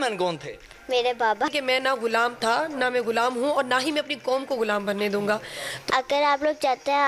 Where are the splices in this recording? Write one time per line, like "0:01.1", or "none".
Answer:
0:01.6
0:05.7

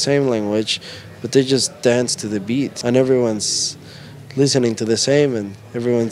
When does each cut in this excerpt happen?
0:02.8

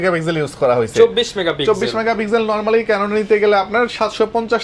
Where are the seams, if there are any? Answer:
none

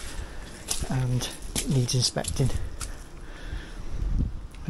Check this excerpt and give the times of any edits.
none

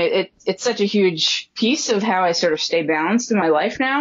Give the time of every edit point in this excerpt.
none

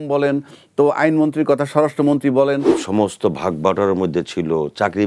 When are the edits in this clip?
0:02.8

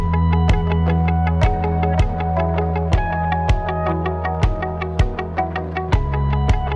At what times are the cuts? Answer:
0:03.5

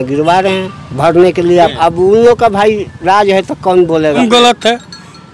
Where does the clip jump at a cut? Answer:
0:01.7
0:04.2

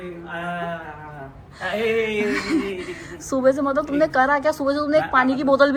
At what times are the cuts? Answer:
none

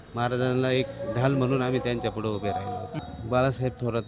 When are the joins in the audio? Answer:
0:02.9

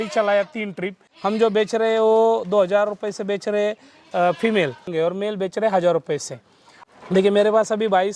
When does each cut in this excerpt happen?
0:01.0
0:04.9
0:06.7

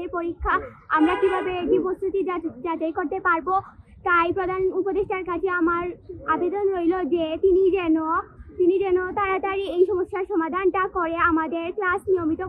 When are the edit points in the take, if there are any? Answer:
none

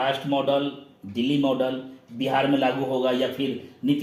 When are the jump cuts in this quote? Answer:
none

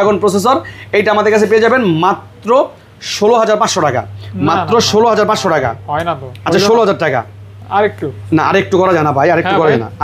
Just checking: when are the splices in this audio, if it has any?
none

